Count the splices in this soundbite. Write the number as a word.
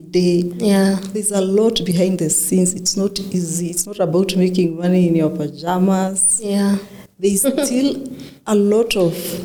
zero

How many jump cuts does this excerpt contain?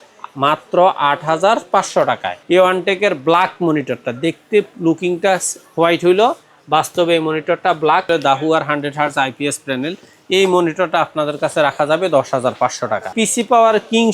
three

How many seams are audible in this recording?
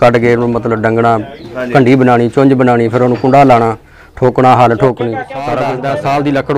one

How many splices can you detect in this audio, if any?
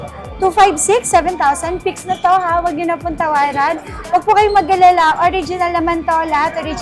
zero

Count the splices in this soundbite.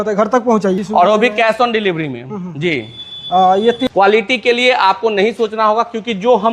two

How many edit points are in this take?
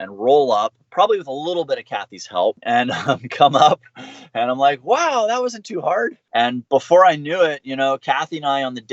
one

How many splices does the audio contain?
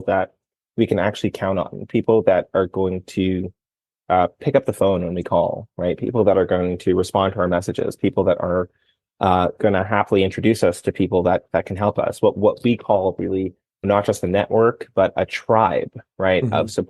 one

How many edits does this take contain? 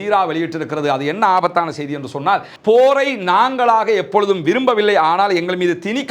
one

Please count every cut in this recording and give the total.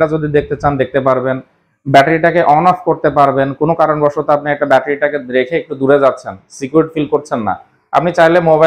zero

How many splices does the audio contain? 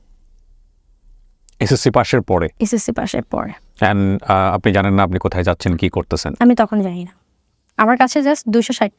zero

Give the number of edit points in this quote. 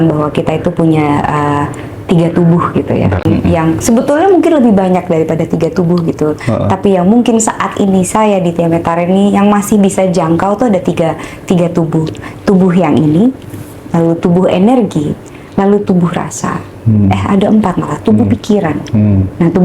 one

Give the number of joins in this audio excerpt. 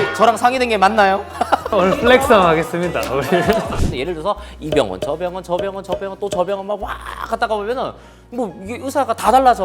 one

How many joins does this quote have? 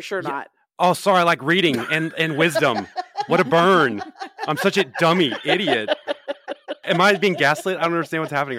one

